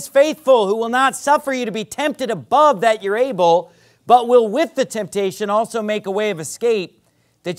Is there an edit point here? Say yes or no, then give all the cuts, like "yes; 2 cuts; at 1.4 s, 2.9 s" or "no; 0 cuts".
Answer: no; 0 cuts